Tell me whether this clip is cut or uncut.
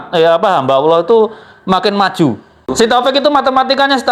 cut